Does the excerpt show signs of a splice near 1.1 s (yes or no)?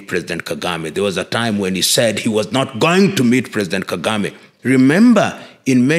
no